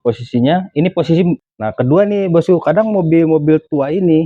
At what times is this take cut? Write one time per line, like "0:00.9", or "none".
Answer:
0:01.5